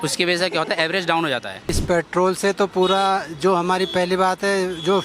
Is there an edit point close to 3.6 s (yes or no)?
no